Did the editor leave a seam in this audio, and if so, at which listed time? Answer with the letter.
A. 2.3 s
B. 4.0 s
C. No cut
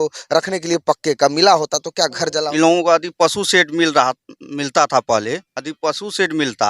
A